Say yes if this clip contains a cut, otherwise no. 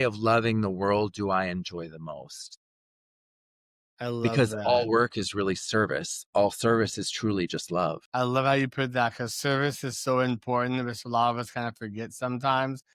no